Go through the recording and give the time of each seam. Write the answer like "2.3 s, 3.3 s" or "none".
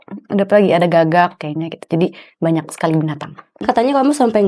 3.5 s